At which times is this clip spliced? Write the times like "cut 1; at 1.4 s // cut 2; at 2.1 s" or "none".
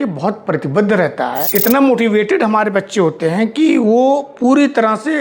cut 1; at 1.4 s